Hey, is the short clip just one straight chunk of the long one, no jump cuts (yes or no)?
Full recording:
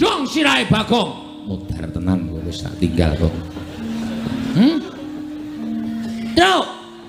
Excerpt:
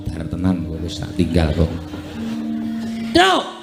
no